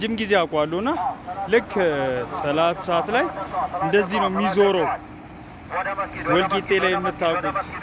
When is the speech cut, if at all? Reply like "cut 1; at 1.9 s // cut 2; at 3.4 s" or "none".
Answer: none